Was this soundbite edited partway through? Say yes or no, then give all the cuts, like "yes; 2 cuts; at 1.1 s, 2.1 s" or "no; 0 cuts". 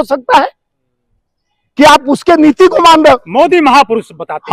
no; 0 cuts